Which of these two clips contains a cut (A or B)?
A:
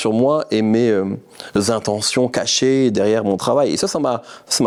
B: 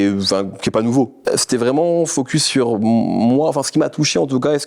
B